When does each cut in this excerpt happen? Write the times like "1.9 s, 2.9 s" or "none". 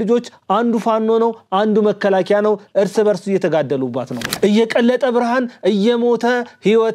4.3 s